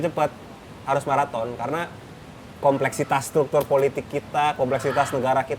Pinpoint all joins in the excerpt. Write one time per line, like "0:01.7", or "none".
none